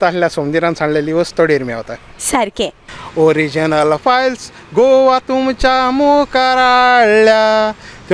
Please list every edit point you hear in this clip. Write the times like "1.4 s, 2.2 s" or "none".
2.8 s